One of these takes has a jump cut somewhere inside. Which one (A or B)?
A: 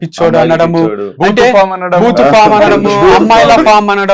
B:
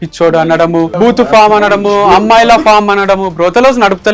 B